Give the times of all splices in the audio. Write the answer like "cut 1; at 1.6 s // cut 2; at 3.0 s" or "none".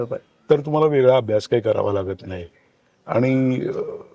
none